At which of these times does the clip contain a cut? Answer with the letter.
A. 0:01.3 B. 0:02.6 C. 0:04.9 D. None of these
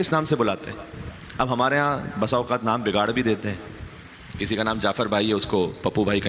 D